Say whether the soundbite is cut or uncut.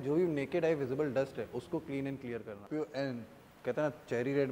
cut